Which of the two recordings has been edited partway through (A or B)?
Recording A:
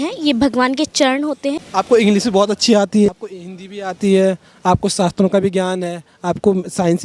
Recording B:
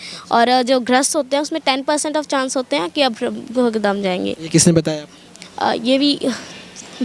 A